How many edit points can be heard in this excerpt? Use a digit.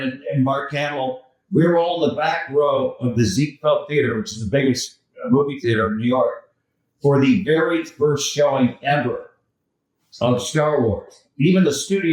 0